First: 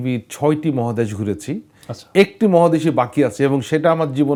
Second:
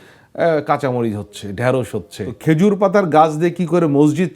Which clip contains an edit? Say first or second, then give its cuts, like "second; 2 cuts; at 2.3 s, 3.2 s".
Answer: second; 1 cut; at 2.2 s